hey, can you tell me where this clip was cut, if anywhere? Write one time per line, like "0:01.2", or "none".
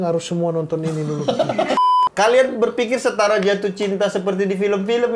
0:01.8